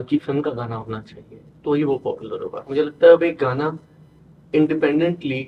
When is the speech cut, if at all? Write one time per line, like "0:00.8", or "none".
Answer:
none